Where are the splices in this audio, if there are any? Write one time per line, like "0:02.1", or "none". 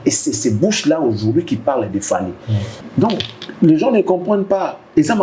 none